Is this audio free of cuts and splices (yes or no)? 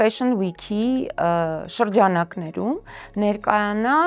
yes